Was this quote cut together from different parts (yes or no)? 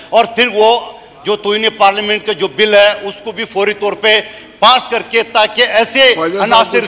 no